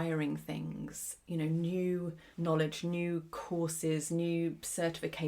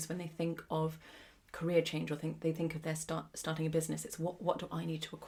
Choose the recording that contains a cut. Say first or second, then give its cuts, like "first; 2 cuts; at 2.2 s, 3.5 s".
first; 2 cuts; at 2.2 s, 3.3 s